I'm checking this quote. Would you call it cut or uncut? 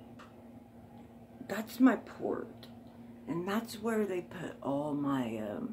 uncut